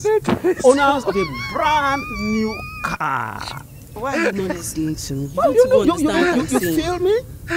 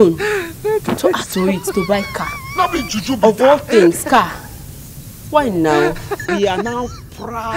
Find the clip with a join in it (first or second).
second